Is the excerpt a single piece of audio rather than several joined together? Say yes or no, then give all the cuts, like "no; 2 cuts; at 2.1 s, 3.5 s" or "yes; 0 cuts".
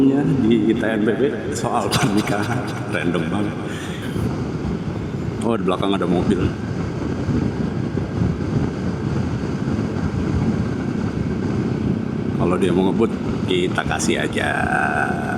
yes; 0 cuts